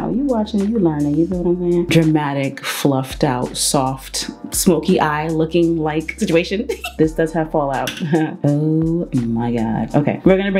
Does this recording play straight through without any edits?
no; 3 cuts; at 1.8 s, 6.9 s, 8.4 s

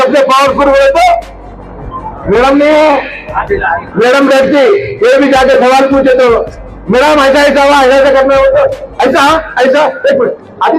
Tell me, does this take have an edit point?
no; 0 cuts

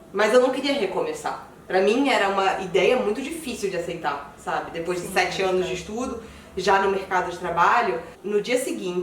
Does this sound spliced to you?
yes; 1 cut; at 8.1 s

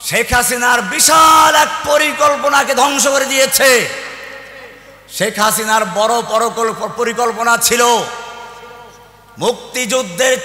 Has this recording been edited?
no; 0 cuts

